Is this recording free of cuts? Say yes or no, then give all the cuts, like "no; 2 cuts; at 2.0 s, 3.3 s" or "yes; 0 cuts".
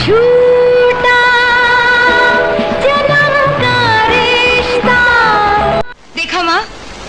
yes; 0 cuts